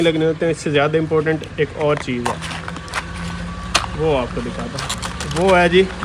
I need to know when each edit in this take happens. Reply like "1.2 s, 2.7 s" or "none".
none